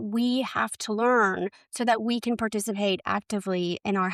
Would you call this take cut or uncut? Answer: uncut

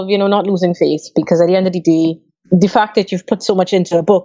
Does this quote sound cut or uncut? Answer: cut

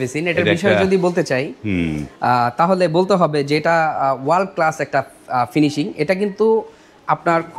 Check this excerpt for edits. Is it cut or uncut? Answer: uncut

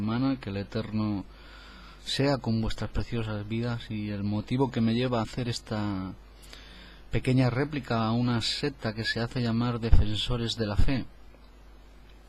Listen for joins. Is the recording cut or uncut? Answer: cut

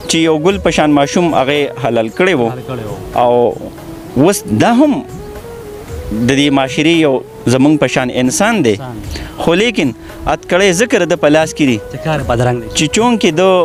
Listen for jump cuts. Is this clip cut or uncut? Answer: uncut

